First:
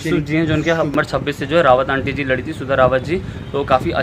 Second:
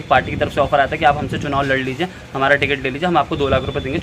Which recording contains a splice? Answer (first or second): first